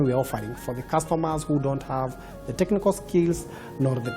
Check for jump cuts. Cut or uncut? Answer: uncut